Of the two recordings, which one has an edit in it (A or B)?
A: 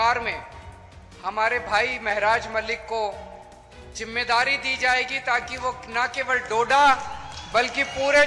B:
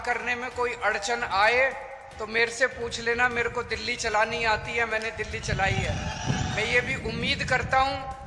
B